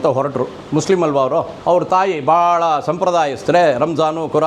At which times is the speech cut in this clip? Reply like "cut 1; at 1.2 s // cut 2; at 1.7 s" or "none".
cut 1; at 1.5 s